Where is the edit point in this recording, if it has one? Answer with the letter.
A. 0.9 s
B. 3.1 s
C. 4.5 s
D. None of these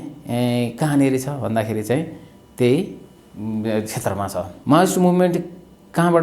C